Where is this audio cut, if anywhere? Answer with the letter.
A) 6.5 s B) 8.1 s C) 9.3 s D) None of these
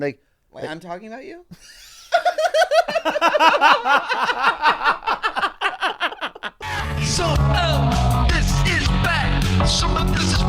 A